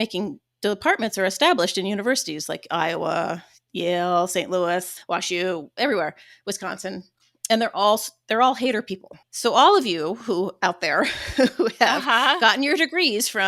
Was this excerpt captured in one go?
yes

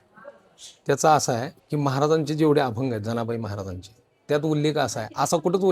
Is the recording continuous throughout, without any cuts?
no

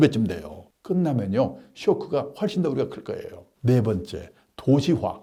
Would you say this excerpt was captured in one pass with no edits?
yes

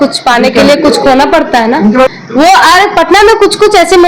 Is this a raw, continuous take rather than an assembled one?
no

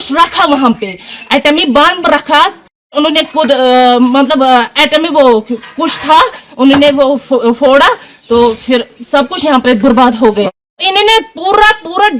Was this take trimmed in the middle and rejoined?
yes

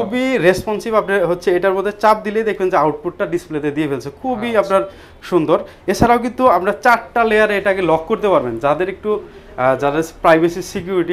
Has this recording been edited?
no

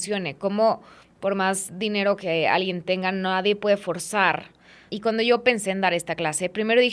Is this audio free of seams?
no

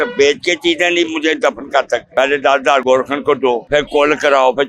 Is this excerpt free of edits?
no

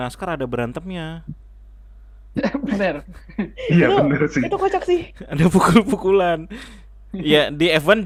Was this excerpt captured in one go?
yes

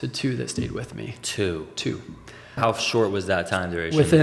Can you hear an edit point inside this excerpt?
yes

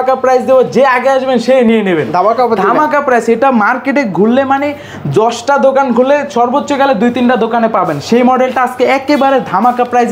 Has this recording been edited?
no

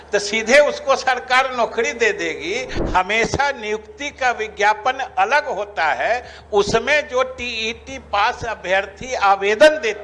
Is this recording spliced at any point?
yes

